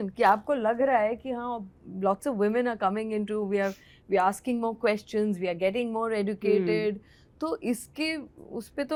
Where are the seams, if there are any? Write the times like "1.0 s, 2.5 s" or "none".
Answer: none